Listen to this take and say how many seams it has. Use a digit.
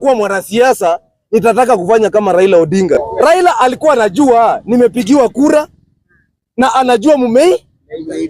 1